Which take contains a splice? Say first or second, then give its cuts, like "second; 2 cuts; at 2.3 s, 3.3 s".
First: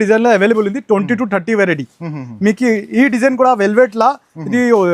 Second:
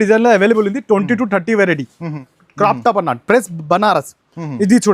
second; 1 cut; at 2.2 s